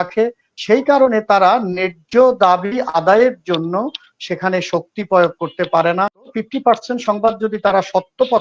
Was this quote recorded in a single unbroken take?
no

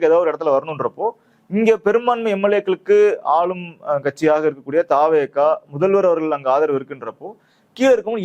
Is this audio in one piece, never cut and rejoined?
yes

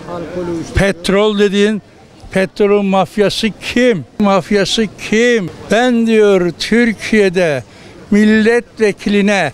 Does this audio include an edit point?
yes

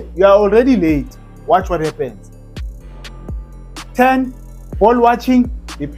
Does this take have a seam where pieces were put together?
no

